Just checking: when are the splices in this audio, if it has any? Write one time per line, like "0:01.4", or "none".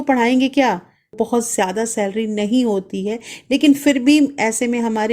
0:01.1